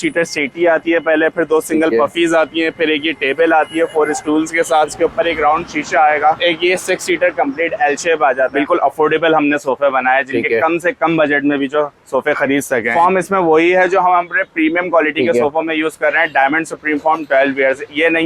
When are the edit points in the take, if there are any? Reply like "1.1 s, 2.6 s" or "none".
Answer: 4.9 s, 6.4 s, 8.5 s, 12.9 s